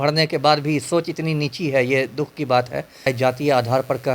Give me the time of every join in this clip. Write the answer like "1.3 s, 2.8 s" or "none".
3.1 s